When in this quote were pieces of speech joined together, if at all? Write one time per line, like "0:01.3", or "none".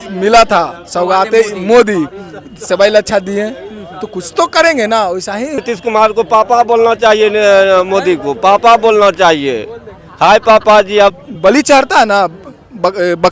0:05.6
0:11.1